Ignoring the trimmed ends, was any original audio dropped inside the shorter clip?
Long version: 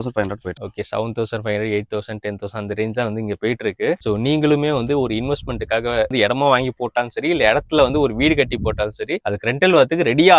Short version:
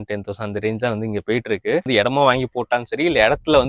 yes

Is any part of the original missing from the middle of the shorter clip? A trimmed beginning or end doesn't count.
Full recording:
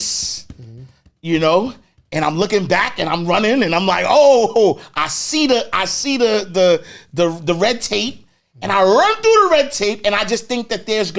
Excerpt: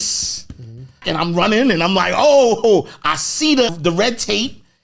yes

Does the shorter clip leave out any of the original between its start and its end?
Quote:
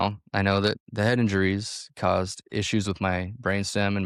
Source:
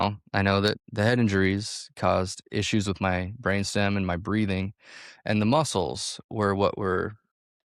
no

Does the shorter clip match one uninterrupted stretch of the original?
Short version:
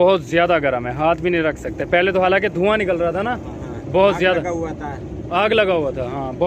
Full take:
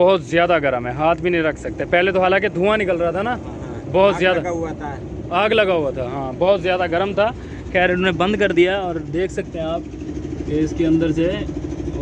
yes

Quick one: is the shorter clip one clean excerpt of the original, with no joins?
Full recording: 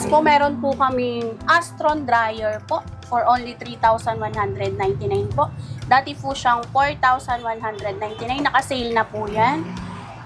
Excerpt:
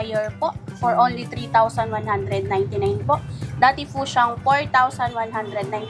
yes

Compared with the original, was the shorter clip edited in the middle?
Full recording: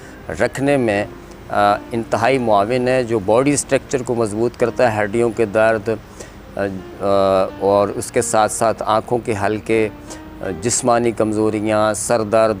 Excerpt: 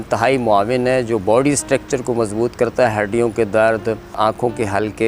yes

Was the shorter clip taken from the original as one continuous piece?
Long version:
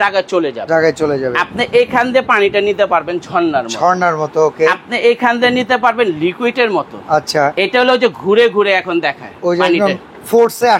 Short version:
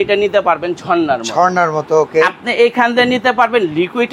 yes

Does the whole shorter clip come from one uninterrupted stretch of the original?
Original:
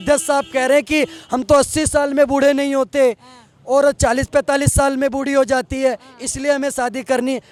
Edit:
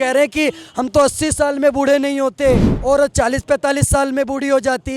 no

